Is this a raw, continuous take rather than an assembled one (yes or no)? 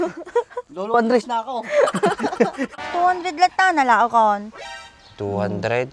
no